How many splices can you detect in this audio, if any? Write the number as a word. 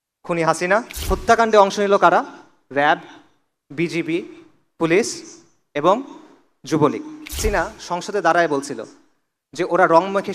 two